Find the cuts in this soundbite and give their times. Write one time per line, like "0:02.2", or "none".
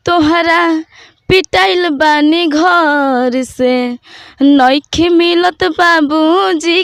none